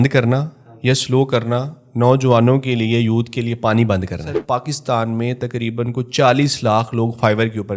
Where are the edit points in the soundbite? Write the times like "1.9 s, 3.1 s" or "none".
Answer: 4.3 s